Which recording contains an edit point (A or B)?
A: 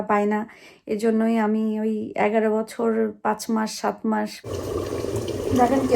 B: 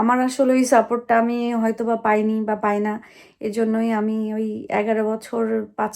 A